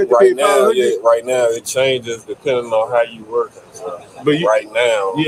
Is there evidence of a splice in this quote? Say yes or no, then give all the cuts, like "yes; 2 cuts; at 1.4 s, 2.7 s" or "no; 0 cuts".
no; 0 cuts